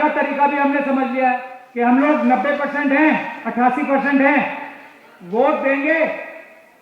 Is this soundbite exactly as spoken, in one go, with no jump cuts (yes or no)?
no